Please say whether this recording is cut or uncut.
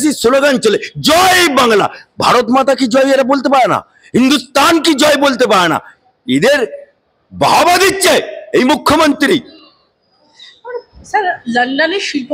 uncut